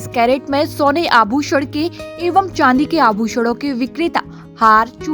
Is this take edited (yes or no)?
no